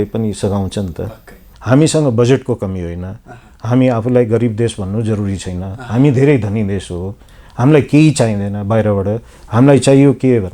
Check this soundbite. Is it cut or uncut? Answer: cut